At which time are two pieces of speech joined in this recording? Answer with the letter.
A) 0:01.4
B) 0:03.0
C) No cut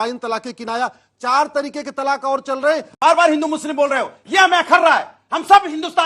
B